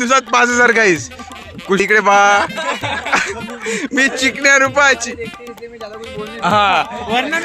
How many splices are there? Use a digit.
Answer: 1